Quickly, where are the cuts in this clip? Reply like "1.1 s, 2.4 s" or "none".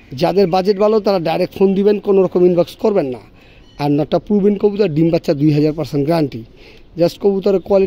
none